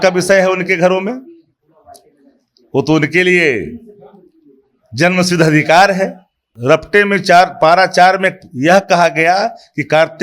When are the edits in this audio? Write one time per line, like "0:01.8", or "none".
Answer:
0:06.5